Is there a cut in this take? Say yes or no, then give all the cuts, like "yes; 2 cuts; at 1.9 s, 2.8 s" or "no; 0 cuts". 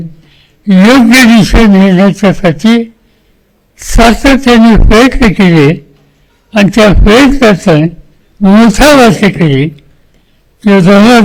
no; 0 cuts